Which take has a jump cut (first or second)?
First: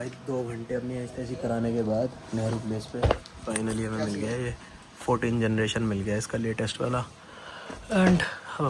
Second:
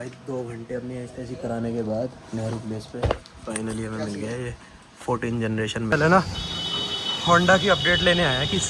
second